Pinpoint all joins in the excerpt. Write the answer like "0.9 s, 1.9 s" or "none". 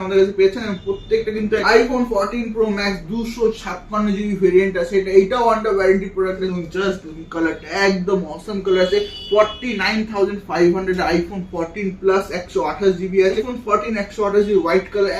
1.6 s, 6.4 s, 13.4 s